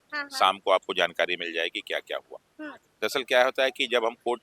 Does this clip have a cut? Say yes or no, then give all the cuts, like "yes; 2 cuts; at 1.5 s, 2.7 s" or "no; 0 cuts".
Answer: no; 0 cuts